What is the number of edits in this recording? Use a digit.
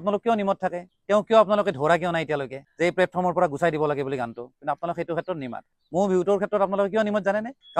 1